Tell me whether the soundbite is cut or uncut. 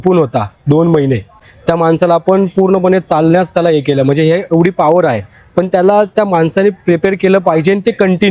uncut